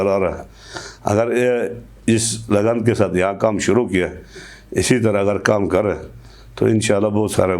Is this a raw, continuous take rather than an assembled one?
yes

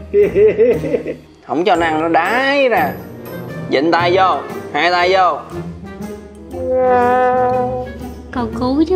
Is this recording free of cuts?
no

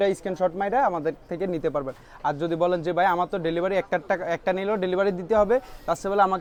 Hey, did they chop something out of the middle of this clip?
no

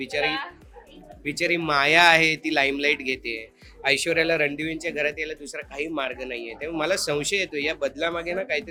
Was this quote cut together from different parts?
no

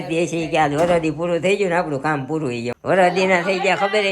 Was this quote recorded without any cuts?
no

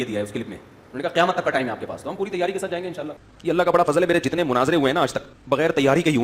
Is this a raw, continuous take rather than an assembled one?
no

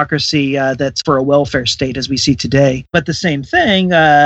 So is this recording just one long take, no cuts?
no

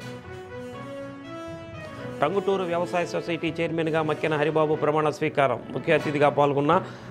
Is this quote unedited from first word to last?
no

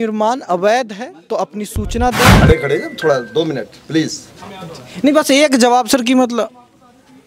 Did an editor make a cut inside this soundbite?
yes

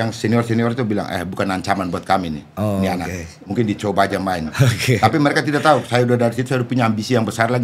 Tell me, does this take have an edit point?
no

